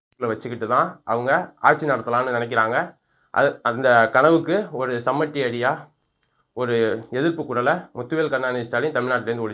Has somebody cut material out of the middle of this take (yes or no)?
no